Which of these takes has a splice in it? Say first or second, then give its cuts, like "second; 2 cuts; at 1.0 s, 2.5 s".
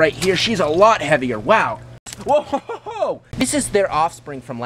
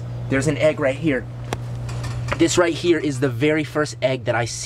first; 2 cuts; at 2.0 s, 3.3 s